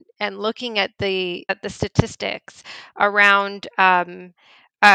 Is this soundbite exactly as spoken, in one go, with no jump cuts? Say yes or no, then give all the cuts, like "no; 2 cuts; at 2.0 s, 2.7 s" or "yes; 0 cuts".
yes; 0 cuts